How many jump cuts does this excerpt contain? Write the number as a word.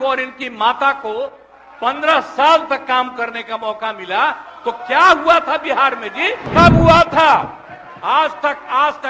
one